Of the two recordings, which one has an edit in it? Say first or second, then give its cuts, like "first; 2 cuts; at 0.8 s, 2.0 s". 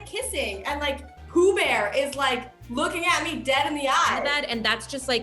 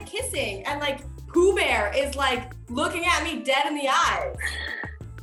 first; 1 cut; at 4.3 s